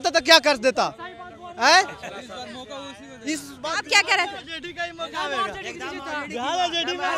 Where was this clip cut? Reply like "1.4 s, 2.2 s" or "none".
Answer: none

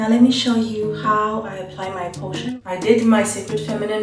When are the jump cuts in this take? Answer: 2.4 s

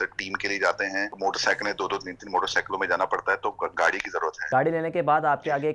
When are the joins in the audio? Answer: 1.1 s, 4.4 s

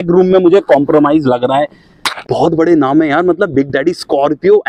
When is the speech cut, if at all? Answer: 2.3 s

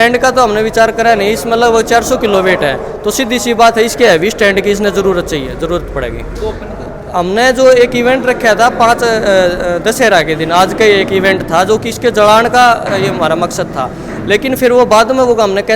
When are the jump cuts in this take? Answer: 6.6 s

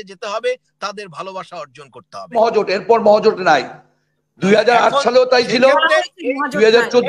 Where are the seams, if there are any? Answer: 2.4 s

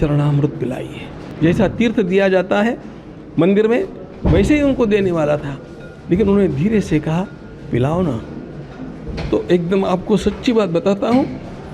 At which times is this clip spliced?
1.2 s

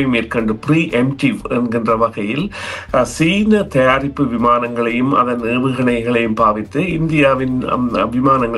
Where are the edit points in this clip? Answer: none

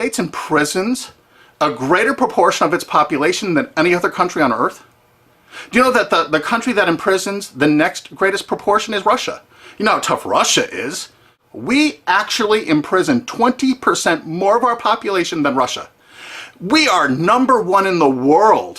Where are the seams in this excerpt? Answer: 6.3 s

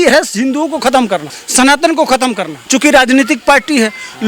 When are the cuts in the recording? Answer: 1.4 s, 2.5 s

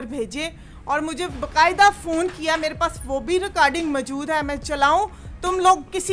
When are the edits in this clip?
none

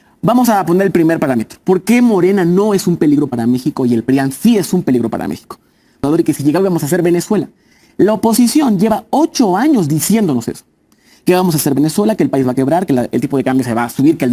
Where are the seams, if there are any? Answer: 6.0 s

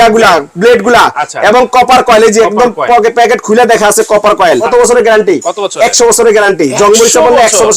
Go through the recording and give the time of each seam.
4.6 s

